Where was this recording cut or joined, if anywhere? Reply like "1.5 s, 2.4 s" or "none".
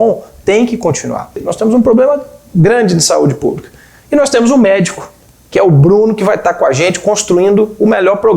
1.5 s